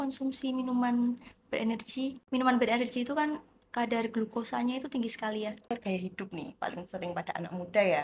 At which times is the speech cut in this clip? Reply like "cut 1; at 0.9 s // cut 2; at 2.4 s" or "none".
cut 1; at 2.2 s // cut 2; at 5.7 s